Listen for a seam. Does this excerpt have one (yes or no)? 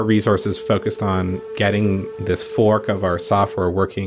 yes